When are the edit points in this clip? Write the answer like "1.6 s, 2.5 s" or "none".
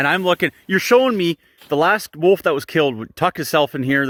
none